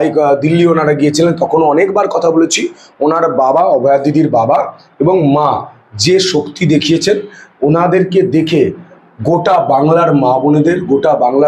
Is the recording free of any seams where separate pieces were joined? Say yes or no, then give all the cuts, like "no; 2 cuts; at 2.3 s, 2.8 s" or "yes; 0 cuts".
yes; 0 cuts